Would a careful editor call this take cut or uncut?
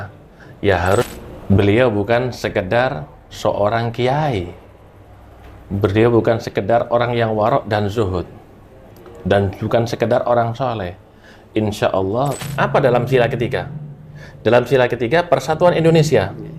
cut